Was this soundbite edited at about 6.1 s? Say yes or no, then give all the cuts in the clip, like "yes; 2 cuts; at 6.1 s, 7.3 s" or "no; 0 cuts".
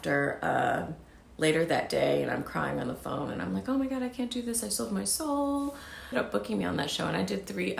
yes; 1 cut; at 6.1 s